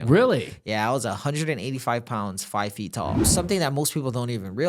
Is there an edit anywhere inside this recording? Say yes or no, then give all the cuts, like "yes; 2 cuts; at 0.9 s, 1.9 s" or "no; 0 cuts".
yes; 1 cut; at 3.3 s